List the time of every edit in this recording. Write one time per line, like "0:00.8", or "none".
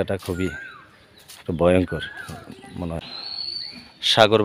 0:03.0